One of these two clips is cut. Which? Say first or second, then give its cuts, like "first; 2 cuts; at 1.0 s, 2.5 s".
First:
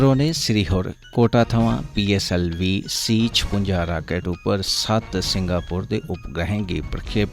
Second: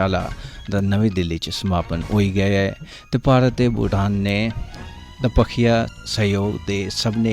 second; 1 cut; at 6.0 s